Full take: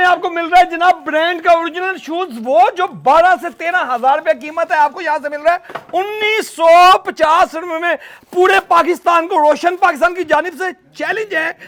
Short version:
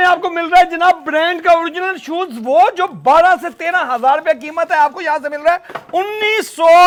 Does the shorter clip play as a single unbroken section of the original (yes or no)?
yes